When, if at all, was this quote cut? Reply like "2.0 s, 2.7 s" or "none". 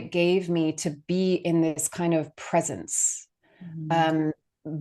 none